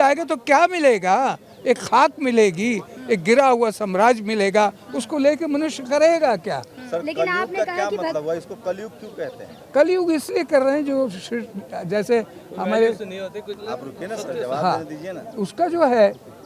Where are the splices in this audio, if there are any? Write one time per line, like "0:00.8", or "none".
none